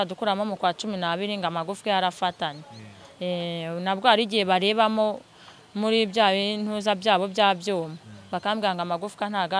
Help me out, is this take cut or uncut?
uncut